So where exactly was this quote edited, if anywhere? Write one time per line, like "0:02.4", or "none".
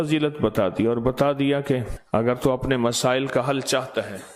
0:02.2